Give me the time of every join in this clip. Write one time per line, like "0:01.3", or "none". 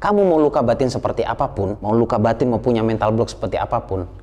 0:01.8